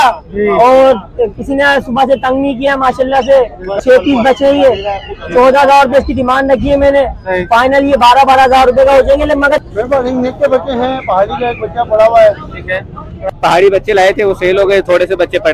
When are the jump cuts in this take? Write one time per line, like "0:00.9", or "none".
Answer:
0:03.7
0:09.6
0:13.2